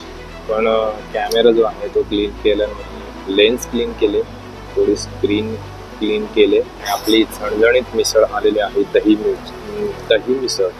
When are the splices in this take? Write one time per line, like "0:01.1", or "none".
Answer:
0:06.8

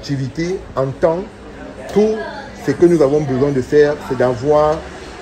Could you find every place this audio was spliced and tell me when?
none

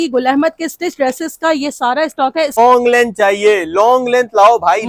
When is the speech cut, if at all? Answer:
0:02.6

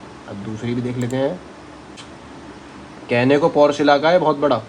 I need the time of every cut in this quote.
0:02.0

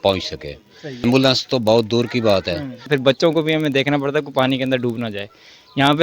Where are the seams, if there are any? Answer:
0:01.0
0:02.9

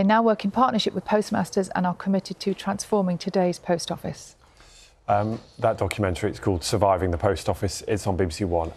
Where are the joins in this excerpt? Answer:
none

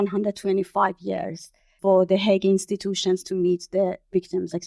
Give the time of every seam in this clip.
none

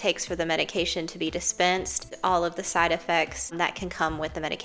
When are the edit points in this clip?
0:02.1
0:03.5

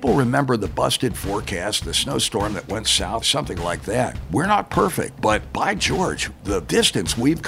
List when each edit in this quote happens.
0:03.3
0:04.2
0:05.5
0:06.7

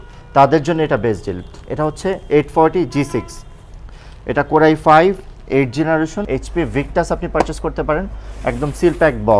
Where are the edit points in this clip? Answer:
0:06.2

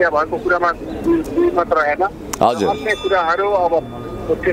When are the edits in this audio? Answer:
none

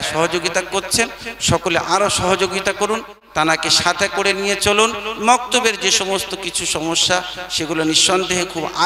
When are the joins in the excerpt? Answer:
none

